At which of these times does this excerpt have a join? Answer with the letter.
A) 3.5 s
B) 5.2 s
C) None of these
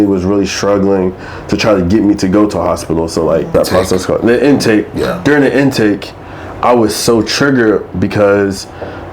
A